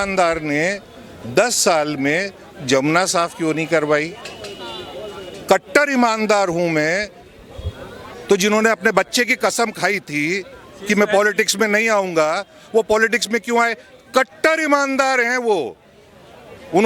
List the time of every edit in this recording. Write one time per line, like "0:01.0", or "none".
none